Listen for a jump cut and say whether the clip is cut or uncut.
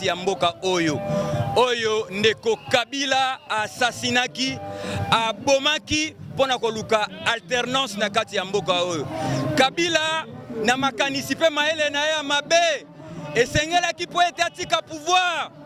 uncut